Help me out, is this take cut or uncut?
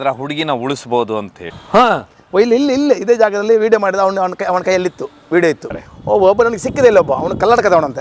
cut